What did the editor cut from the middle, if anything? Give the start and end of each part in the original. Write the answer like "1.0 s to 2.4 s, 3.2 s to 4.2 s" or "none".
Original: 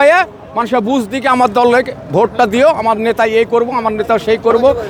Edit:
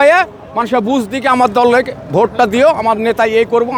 none